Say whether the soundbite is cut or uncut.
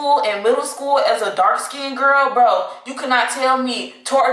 uncut